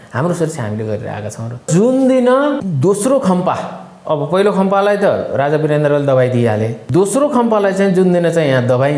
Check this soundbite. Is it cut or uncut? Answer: cut